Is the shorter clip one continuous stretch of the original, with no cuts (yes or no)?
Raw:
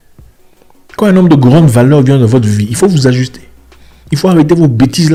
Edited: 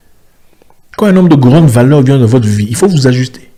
yes